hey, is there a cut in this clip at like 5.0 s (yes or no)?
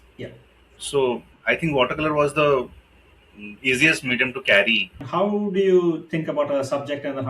yes